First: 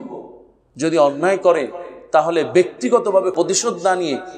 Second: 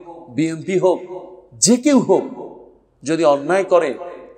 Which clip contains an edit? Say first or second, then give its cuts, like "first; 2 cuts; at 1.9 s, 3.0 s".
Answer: first; 1 cut; at 3.3 s